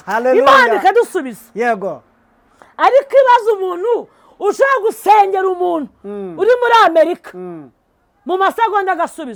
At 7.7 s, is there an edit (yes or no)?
no